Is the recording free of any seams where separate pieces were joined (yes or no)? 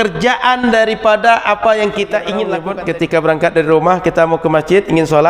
no